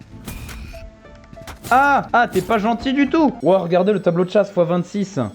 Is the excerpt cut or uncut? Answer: cut